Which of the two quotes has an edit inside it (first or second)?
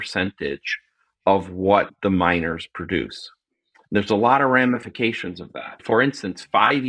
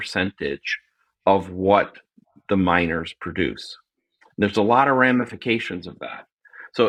first